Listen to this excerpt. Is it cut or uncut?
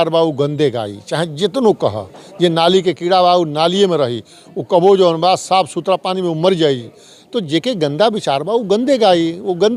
uncut